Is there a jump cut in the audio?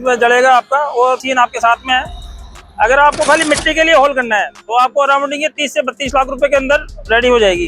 yes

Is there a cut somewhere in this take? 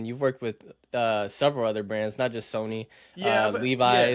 no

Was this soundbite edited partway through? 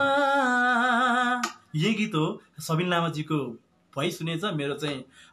no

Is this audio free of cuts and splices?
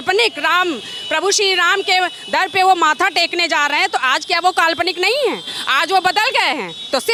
yes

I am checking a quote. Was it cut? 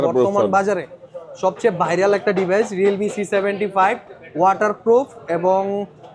no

